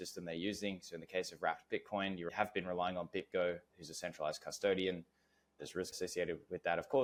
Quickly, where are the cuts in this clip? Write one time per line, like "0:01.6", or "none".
none